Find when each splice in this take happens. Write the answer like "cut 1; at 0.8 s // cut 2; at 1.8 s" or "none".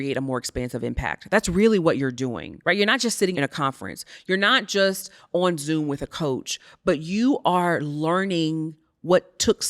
cut 1; at 2.5 s // cut 2; at 3.3 s